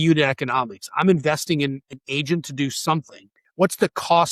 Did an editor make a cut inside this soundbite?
yes; 2 cuts; at 1.9 s, 3.4 s

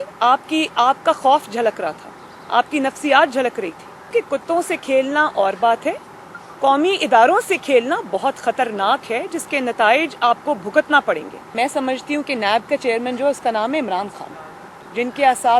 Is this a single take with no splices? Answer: no; 3 cuts; at 4.0 s, 11.5 s, 14.7 s

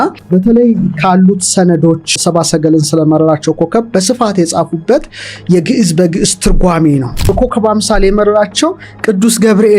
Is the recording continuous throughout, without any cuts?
no; 2 cuts; at 2.1 s, 7.3 s

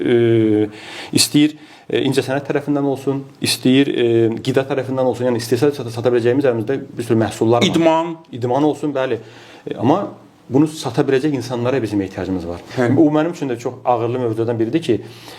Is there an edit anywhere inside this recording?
yes; 1 cut; at 12.6 s

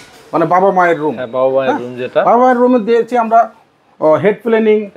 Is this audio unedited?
yes; 0 cuts

